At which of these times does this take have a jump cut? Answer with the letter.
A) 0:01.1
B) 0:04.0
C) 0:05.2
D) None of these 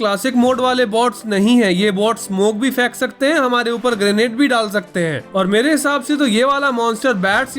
C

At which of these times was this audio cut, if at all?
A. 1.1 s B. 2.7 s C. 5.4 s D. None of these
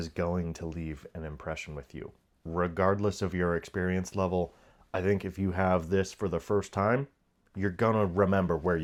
D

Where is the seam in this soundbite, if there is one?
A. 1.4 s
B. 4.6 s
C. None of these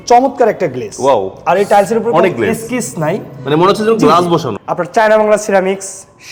B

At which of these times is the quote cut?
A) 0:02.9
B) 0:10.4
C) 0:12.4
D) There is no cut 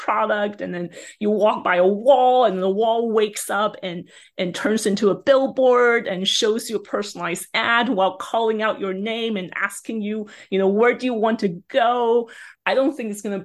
C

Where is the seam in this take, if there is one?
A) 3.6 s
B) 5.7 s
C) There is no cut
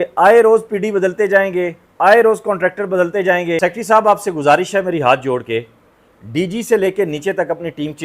A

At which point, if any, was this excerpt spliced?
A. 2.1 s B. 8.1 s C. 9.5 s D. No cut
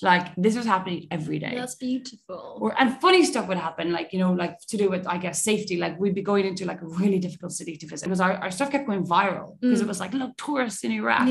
B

